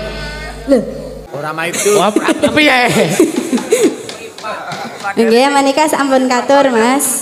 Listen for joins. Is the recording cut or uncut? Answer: cut